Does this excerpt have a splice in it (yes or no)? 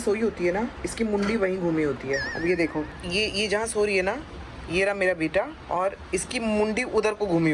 no